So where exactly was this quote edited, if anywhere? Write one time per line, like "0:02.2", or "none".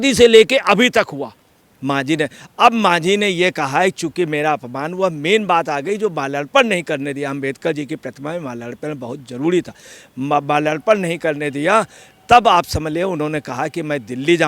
0:01.7

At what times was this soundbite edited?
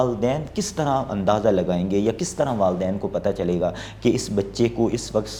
none

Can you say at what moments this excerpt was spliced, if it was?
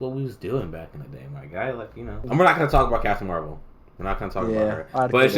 0:02.2

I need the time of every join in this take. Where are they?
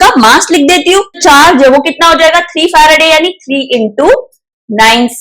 0:01.2

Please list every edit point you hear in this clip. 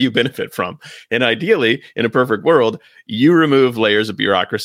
none

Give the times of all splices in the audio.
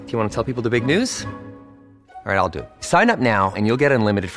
none

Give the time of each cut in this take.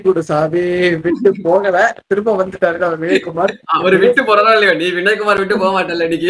none

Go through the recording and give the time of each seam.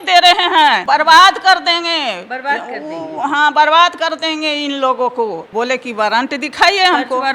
0:00.8
0:05.5

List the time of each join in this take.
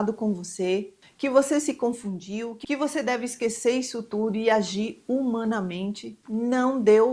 none

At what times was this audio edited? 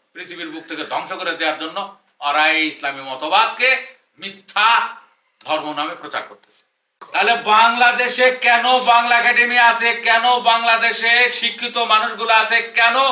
0:07.0

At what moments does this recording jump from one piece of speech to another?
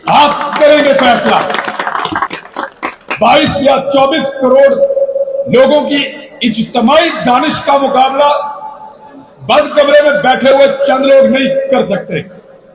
0:02.3

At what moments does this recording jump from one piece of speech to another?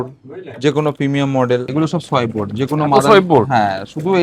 0:01.7

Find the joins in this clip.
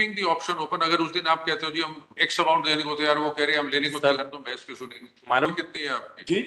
0:05.5

